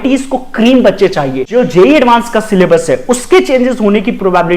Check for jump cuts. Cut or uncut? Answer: cut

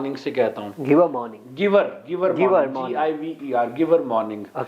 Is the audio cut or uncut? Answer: uncut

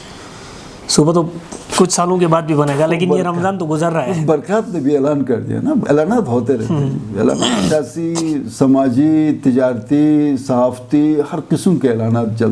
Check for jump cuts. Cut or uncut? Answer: uncut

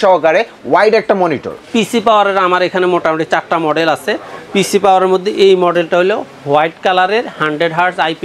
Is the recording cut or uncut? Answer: cut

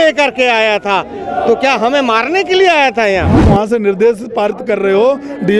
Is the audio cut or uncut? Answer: cut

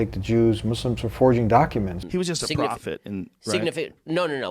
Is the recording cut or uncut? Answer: cut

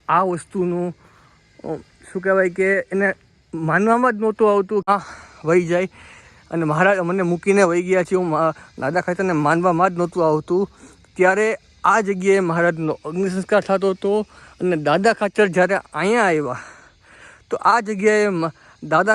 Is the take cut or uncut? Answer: cut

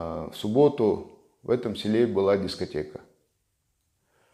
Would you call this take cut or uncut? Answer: uncut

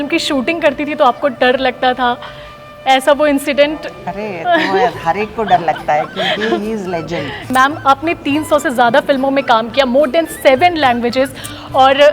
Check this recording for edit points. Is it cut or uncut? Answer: cut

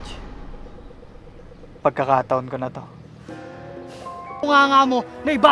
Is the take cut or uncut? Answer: cut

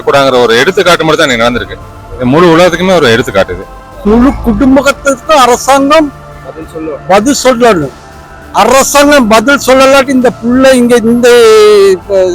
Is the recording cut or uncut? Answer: cut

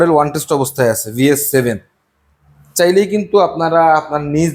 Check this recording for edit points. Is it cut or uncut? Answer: uncut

